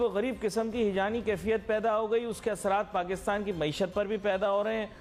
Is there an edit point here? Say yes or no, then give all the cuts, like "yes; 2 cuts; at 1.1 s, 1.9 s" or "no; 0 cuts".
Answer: no; 0 cuts